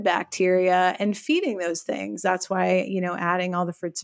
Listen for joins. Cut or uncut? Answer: uncut